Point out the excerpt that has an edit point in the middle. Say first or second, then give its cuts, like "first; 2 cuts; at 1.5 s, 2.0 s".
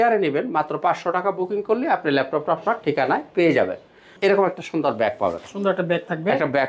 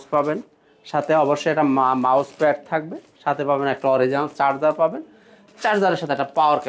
first; 1 cut; at 4.1 s